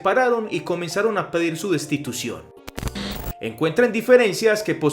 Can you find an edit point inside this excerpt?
yes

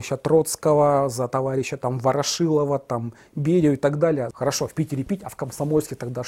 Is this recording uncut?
no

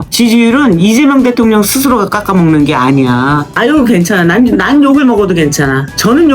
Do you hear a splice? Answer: yes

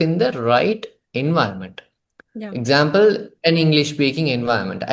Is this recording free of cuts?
yes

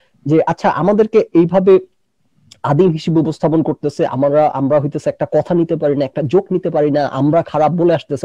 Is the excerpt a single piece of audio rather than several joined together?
yes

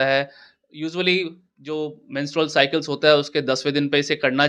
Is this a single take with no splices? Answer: yes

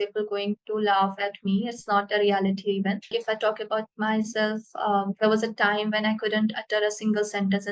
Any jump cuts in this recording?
yes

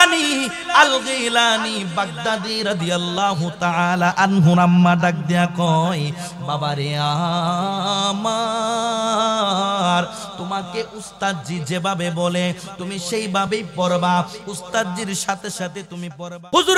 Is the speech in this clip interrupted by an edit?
yes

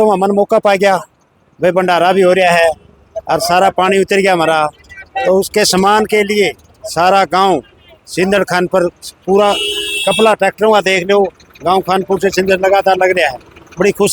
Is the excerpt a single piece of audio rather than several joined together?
yes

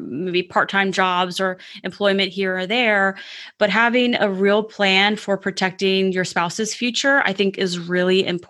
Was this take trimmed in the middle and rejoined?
no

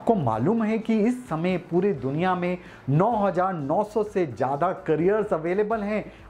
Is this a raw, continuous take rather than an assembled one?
yes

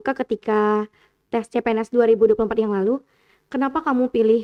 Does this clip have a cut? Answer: no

